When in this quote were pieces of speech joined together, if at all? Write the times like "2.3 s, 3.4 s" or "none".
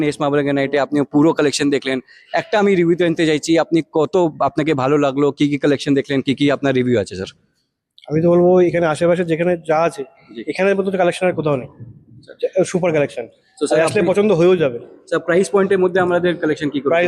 none